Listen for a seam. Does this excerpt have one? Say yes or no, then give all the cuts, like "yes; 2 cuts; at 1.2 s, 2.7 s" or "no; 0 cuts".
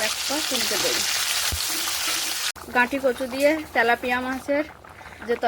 yes; 1 cut; at 2.5 s